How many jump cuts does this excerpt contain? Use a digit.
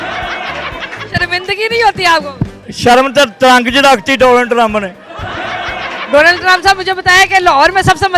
1